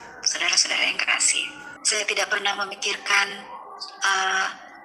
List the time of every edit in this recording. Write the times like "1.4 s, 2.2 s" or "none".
1.7 s